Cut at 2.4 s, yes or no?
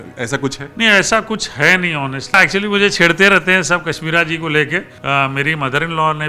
yes